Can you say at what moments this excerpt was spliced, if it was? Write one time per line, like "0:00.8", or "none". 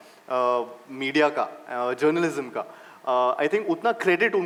none